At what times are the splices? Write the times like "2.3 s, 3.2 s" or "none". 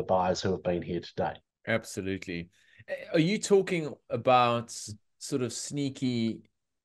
1.5 s